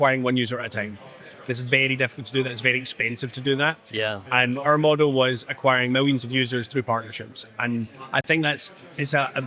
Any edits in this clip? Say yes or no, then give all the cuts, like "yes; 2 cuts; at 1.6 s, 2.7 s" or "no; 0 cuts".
no; 0 cuts